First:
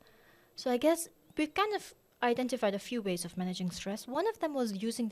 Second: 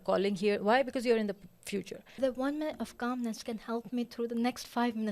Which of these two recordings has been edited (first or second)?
second